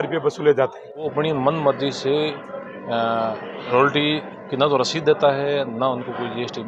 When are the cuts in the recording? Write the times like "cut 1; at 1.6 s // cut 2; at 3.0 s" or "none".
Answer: cut 1; at 1.1 s